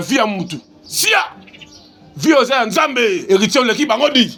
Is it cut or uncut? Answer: uncut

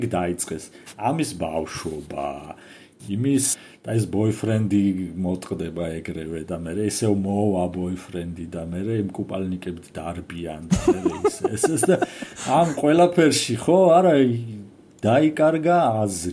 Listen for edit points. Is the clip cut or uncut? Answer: cut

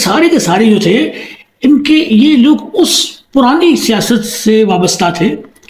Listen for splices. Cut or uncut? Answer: uncut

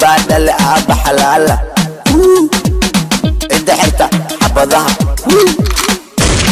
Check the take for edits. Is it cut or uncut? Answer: uncut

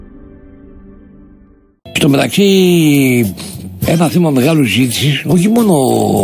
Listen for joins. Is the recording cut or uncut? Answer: uncut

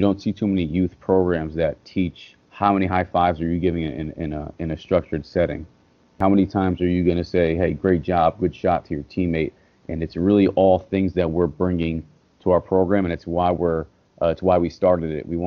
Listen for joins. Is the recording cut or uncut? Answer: cut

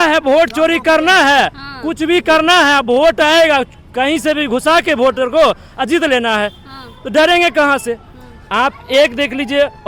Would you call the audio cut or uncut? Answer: uncut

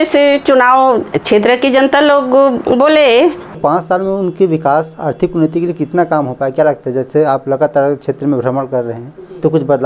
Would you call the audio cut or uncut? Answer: cut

